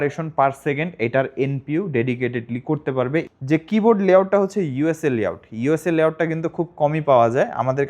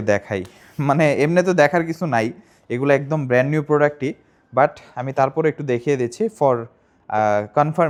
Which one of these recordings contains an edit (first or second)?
first